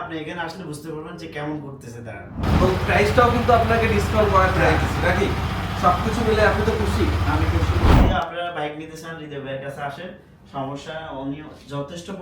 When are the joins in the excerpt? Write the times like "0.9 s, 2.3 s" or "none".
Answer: 2.4 s, 7.9 s